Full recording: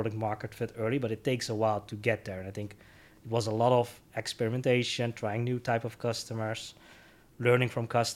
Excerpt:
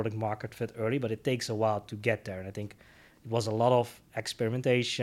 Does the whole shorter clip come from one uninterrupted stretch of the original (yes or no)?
yes